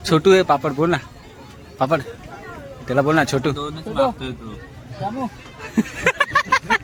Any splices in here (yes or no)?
no